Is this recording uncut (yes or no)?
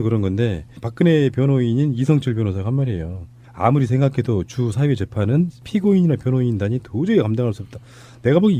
no